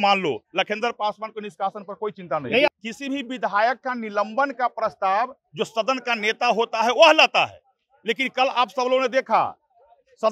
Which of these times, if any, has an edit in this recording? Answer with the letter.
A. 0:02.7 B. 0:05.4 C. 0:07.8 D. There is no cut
A